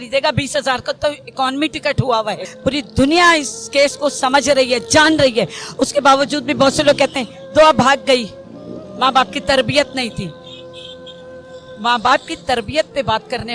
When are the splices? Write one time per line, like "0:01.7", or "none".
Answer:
0:02.4